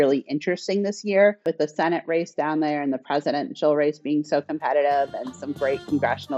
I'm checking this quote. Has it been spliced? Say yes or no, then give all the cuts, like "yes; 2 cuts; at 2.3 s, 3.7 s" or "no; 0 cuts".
yes; 1 cut; at 1.4 s